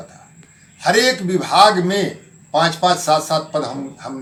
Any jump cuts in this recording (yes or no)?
no